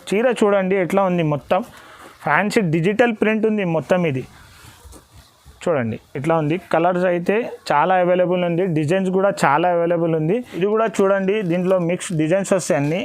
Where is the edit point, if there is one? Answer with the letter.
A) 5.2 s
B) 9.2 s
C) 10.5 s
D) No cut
C